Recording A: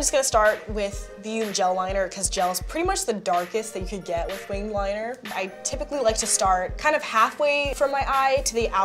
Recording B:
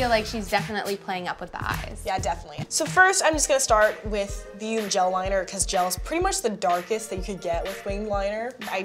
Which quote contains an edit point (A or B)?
B